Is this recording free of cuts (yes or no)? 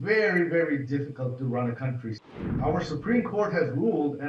no